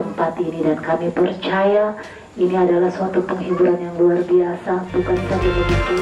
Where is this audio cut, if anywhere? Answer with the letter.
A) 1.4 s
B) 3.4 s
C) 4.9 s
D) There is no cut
D